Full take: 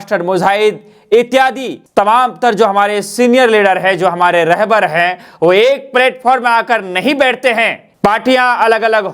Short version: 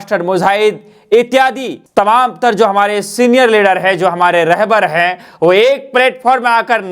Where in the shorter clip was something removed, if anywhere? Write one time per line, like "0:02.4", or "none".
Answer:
none